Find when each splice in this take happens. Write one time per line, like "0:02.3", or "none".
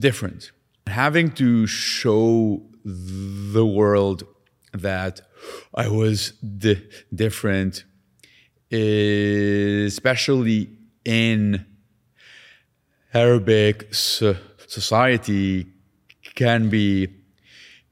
0:00.9